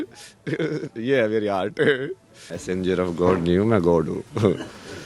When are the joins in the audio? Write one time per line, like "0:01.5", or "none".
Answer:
0:02.6